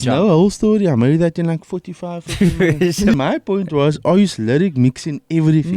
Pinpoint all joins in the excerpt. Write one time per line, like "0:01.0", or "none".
0:03.1